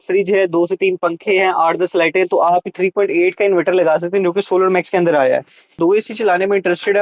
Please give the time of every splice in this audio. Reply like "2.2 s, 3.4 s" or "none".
5.8 s